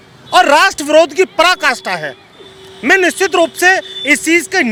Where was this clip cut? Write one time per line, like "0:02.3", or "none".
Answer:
none